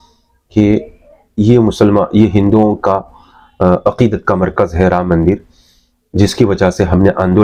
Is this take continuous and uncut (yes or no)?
yes